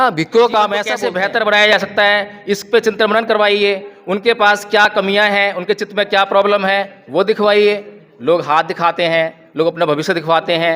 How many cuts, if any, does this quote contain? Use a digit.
1